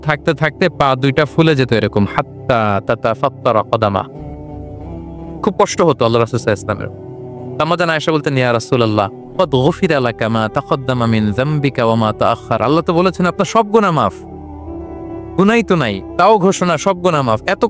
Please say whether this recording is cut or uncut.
uncut